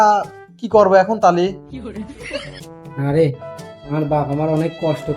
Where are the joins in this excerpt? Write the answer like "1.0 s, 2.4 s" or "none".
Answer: 2.6 s